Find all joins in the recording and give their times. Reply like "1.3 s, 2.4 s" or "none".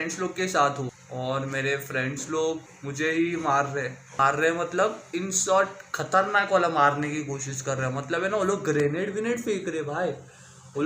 1.0 s, 2.8 s, 4.0 s